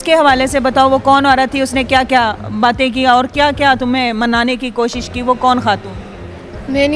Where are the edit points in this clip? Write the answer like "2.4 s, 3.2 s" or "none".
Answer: none

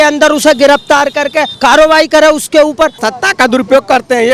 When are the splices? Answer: 1.5 s, 3.0 s

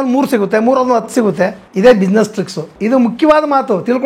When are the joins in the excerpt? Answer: 1.6 s, 2.7 s

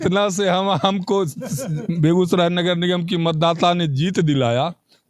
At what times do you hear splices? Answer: none

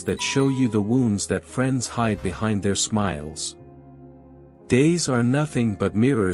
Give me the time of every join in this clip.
none

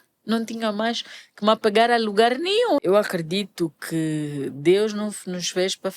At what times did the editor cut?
2.8 s

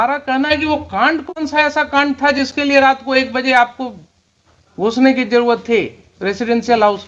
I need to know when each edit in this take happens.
none

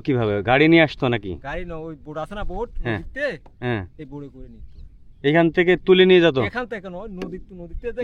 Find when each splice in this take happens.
none

